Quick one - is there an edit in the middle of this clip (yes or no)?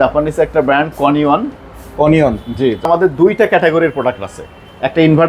yes